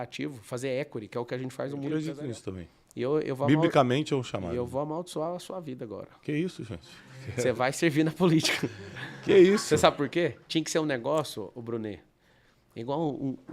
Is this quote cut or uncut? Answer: cut